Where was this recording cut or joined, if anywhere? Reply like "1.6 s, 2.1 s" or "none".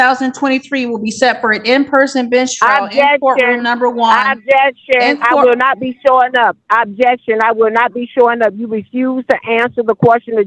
none